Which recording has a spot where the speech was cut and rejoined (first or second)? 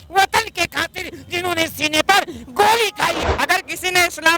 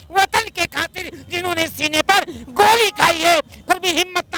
first